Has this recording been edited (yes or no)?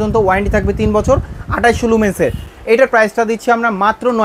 no